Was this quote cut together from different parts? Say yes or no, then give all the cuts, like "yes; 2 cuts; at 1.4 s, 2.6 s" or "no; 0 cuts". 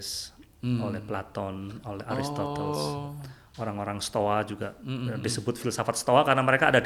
no; 0 cuts